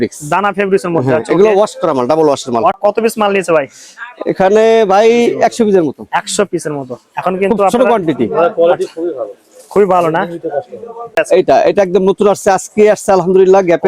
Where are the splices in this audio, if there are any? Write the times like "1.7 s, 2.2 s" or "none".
2.8 s, 11.2 s